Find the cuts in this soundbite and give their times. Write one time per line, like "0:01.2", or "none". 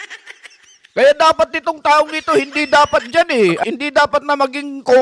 0:03.6